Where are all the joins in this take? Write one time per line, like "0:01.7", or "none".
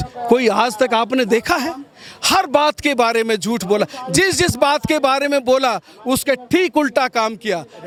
none